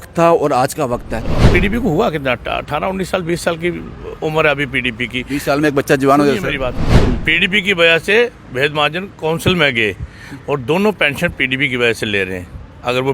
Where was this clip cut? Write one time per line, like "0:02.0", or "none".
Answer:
0:01.3
0:06.9

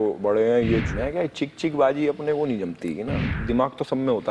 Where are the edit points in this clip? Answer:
0:00.9
0:03.3

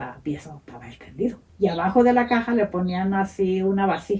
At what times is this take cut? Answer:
0:01.4

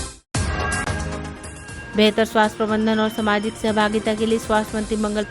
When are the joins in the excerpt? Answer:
none

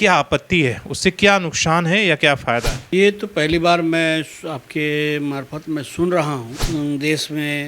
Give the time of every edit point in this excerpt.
0:02.8
0:06.5

